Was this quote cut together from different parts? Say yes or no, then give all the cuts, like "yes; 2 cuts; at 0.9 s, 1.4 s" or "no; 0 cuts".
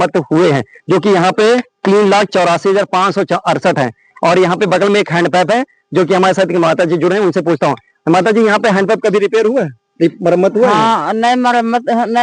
no; 0 cuts